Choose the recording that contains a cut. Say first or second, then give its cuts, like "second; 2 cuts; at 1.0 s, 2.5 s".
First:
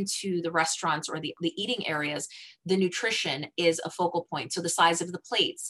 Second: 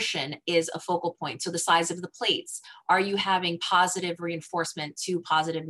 first; 1 cut; at 1.3 s